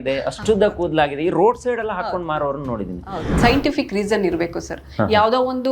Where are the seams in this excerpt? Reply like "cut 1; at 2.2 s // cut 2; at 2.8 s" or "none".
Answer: cut 1; at 3.3 s

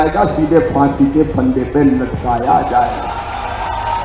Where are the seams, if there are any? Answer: none

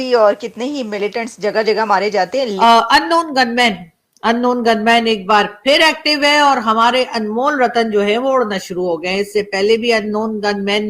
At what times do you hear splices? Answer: cut 1; at 2.5 s

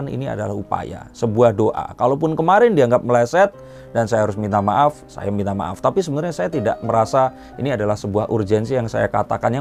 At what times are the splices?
none

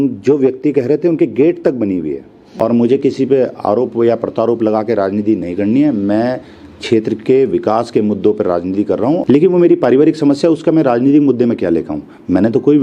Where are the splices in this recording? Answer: cut 1; at 2.4 s // cut 2; at 9.2 s

